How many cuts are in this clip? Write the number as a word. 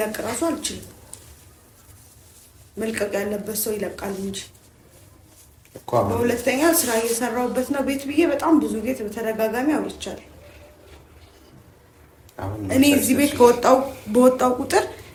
zero